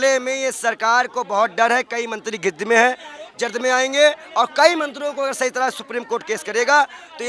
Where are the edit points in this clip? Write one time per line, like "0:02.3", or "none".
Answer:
none